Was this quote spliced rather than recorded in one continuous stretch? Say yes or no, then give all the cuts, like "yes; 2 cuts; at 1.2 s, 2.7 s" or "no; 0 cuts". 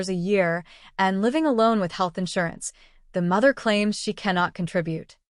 no; 0 cuts